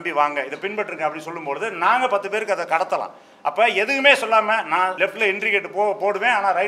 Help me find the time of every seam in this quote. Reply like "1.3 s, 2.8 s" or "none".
4.9 s

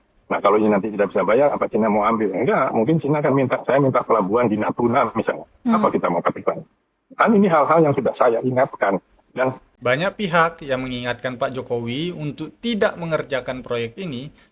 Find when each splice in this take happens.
9.6 s

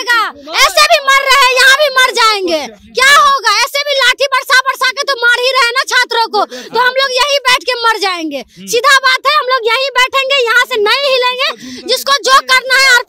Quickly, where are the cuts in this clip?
none

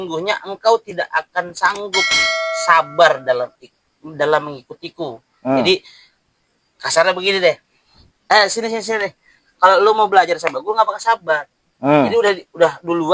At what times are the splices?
none

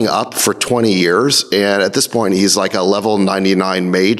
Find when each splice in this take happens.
none

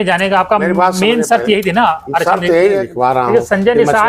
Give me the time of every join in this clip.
2.9 s

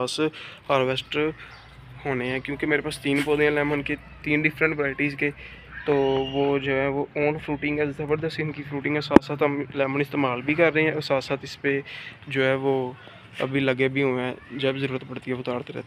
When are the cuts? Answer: none

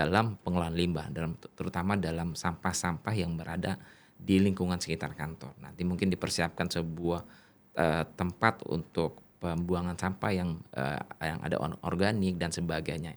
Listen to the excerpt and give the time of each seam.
none

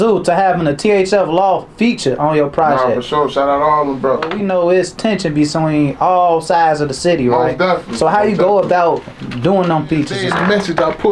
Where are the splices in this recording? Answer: 4.4 s, 10.2 s

